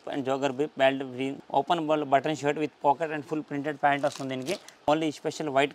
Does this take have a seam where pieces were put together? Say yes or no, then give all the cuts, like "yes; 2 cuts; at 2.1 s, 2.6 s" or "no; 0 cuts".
yes; 2 cuts; at 1.4 s, 4.9 s